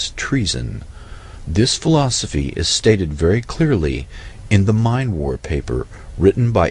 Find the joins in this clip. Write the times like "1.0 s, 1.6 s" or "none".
none